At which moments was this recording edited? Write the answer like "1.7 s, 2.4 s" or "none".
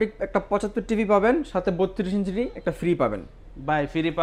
none